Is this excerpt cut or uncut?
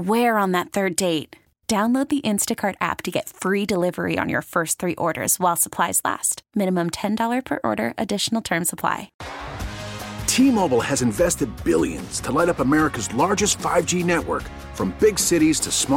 cut